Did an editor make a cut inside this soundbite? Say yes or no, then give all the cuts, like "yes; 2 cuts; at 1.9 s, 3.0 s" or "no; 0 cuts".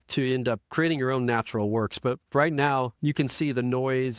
no; 0 cuts